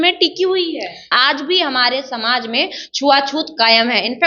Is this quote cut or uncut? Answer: cut